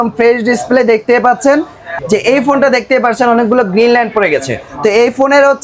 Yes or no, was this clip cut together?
yes